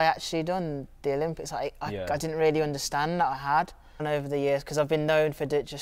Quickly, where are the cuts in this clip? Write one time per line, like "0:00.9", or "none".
0:04.0

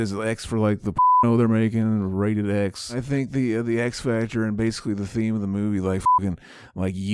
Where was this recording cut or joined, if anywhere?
0:02.9

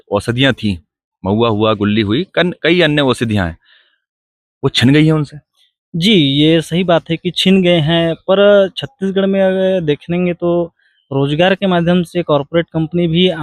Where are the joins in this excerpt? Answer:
none

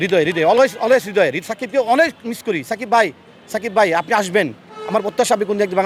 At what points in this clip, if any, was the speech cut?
none

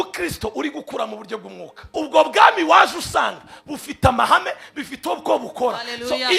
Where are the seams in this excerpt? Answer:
0:01.8

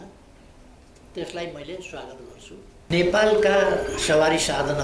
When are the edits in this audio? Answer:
0:02.9

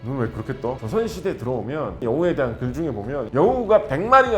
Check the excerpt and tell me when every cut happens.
0:00.8
0:02.0
0:03.3

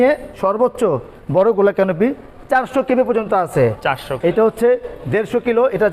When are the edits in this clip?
0:04.1

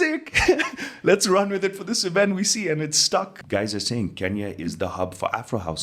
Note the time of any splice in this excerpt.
0:03.4

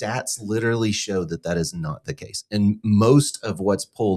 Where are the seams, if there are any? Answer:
none

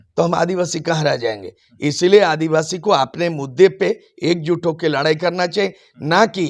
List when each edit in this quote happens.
none

